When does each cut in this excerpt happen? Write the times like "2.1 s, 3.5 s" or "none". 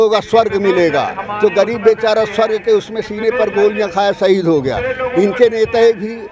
none